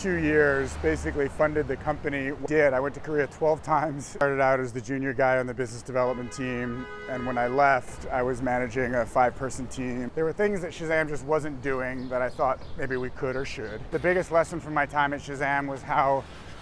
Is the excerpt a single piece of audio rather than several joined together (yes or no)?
no